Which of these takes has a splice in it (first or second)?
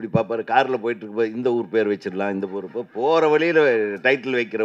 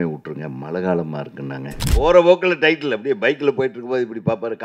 second